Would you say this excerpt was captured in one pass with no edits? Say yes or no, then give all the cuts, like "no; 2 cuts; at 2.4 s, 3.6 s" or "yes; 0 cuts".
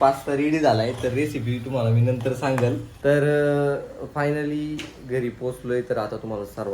no; 1 cut; at 2.9 s